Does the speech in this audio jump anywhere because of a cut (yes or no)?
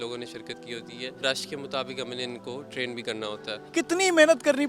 yes